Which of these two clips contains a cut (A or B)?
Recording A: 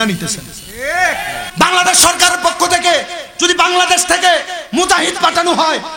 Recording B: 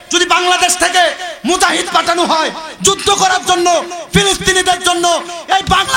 A